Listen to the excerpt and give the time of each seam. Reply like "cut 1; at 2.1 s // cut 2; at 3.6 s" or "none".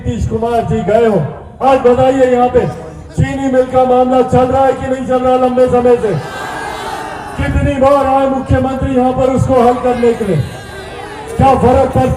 cut 1; at 1.4 s